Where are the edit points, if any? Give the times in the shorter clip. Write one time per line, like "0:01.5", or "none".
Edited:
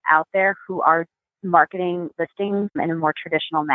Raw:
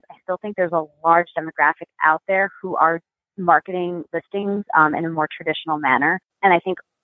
0:02.8